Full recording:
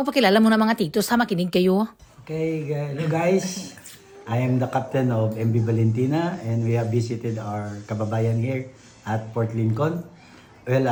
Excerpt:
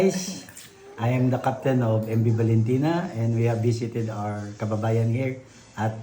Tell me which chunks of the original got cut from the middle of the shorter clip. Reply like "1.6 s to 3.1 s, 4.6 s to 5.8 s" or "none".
none